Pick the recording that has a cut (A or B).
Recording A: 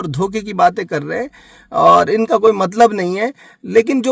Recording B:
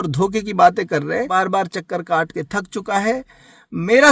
B